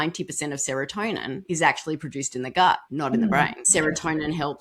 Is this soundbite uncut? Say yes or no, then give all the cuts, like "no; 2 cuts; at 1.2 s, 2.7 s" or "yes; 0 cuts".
no; 3 cuts; at 1.4 s, 2.9 s, 3.6 s